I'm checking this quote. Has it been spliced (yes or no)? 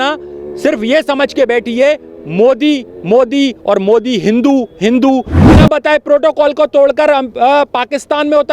yes